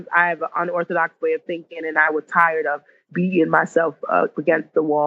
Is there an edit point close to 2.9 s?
no; 0 cuts

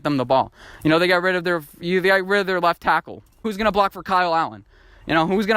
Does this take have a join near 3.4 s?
yes; 1 cut; at 3.4 s

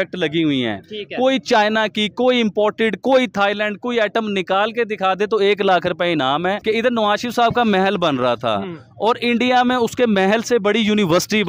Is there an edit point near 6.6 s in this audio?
yes; 1 cut; at 6.6 s

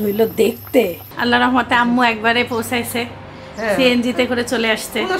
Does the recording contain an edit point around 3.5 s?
no; 1 cut; at 1.1 s

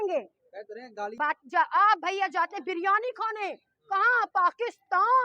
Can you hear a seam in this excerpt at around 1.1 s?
yes; 1 cut; at 1.1 s

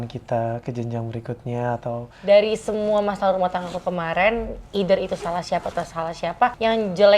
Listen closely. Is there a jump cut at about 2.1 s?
yes; 1 cut; at 2.1 s

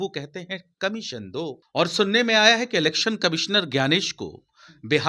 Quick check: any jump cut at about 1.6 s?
yes; 1 cut; at 1.6 s

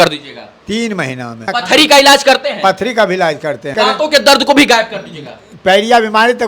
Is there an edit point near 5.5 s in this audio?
no; 2 cuts; at 1.4 s, 3.7 s

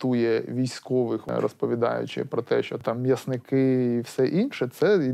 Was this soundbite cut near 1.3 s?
yes; 2 cuts; at 1.3 s, 2.8 s

